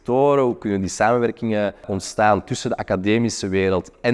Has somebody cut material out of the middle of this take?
yes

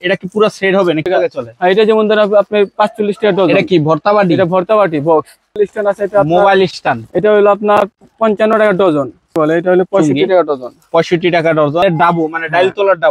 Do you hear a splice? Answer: yes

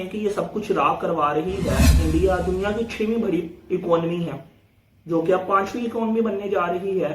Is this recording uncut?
no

